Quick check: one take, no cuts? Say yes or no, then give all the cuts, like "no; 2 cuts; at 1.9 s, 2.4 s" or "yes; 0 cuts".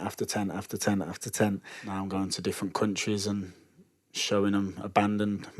no; 1 cut; at 1.8 s